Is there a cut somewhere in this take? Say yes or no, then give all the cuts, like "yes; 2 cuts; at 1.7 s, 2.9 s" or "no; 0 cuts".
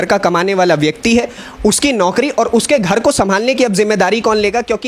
no; 0 cuts